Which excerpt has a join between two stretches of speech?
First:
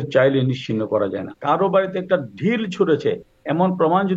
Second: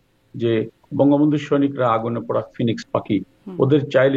first; 1 cut; at 1.3 s

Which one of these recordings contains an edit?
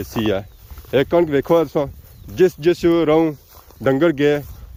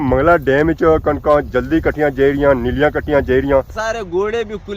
second; 1 cut; at 3.7 s

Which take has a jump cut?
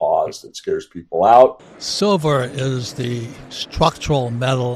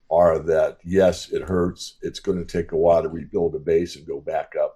first; 1 cut; at 1.6 s

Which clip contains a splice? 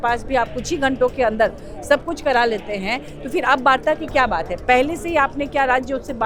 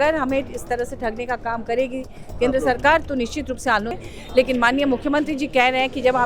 second; 1 cut; at 4.0 s

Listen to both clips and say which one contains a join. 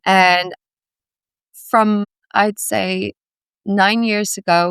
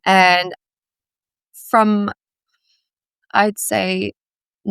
first; 1 cut; at 2.2 s

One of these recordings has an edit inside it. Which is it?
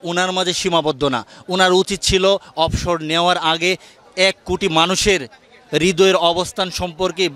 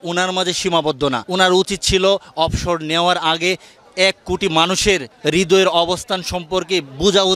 second; 2 cuts; at 1.2 s, 5.1 s

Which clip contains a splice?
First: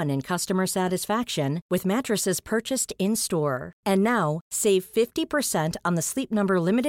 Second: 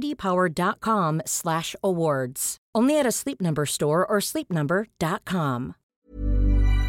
second; 1 cut; at 5.8 s

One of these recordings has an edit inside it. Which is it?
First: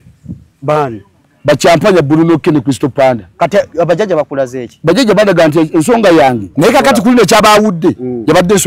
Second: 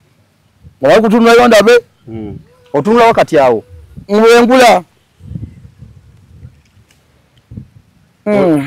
first; 1 cut; at 6.5 s

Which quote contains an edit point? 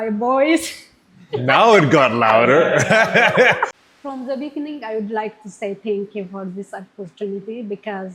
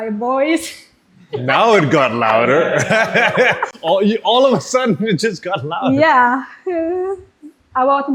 first; 1 cut; at 3.7 s

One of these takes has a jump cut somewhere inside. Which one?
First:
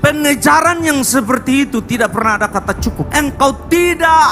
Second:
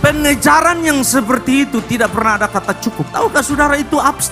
first; 1 cut; at 3.1 s

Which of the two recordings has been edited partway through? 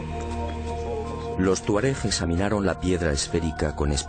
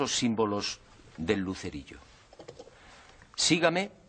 second; 1 cut; at 1.8 s

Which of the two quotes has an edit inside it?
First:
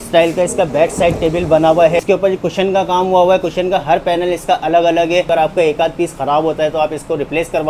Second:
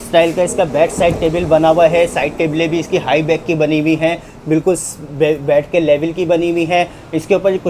first; 2 cuts; at 2.0 s, 5.3 s

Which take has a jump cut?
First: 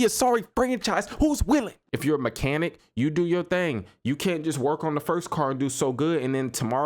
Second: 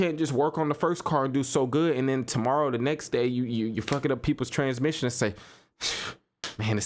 first; 1 cut; at 1.8 s

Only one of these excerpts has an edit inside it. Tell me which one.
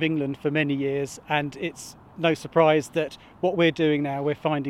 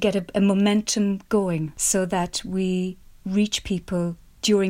second; 1 cut; at 1.7 s

